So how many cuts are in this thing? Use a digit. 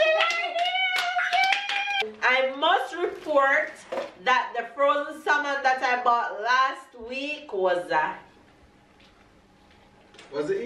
1